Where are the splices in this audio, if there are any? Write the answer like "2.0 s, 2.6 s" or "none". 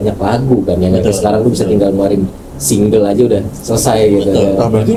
none